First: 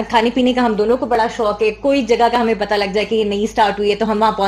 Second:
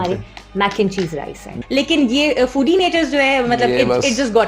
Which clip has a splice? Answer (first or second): second